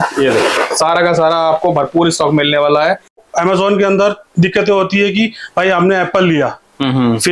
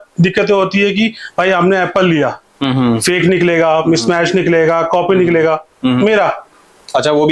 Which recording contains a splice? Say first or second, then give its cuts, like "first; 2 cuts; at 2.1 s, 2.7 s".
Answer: first; 1 cut; at 3.2 s